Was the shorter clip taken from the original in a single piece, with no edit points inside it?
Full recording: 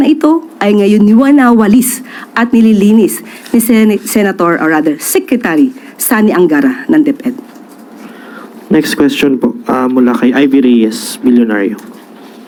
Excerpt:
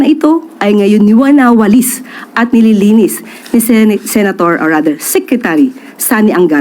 yes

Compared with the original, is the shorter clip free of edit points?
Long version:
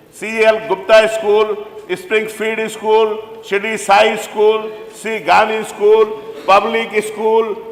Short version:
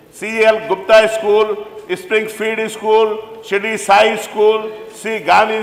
yes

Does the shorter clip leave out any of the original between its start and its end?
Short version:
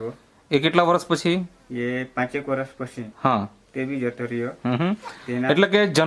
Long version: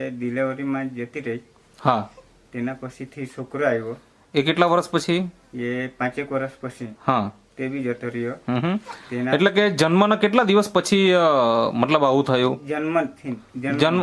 no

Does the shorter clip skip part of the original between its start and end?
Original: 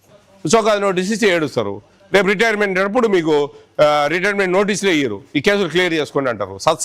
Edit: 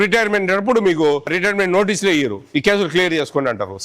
yes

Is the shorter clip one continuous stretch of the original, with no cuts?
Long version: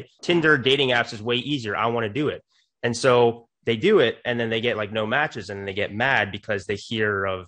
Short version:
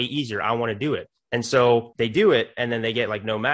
no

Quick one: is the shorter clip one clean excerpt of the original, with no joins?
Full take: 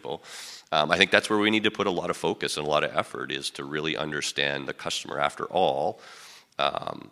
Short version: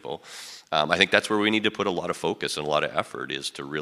yes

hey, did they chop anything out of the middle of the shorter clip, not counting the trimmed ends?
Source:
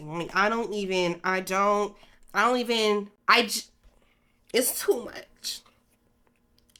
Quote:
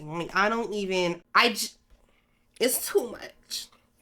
yes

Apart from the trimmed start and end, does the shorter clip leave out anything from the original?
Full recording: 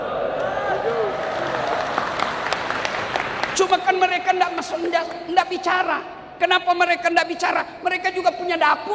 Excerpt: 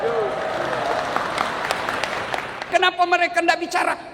yes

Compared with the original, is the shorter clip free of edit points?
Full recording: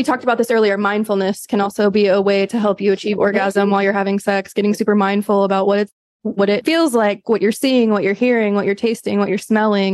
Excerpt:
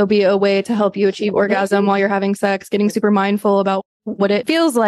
no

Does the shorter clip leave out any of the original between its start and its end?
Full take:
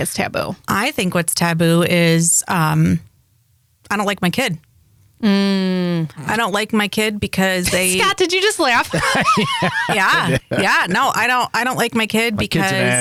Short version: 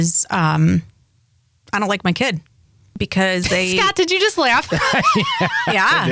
yes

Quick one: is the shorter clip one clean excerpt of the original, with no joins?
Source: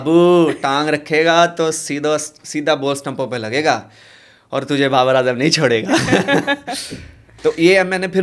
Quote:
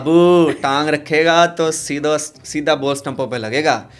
yes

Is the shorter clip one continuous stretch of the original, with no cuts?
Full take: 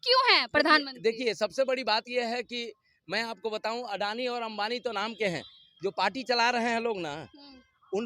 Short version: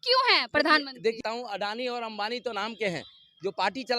no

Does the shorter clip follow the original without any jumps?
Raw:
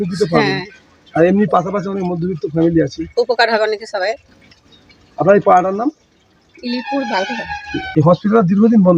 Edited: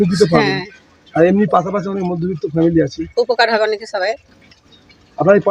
yes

